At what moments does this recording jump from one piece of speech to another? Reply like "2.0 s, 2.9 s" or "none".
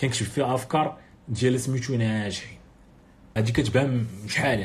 3.3 s